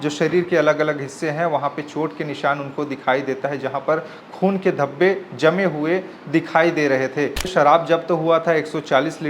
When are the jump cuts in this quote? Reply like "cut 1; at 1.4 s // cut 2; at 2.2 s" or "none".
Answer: cut 1; at 7.5 s